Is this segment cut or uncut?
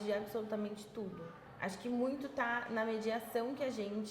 cut